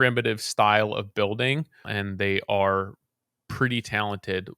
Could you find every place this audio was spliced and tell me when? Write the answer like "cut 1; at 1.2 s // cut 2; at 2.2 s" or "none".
cut 1; at 1.9 s